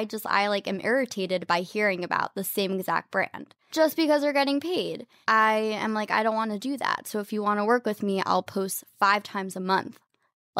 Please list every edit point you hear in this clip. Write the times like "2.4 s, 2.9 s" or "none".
3.7 s, 5.1 s